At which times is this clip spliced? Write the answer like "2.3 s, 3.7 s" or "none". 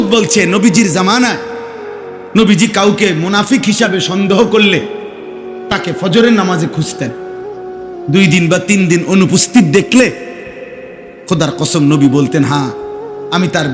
none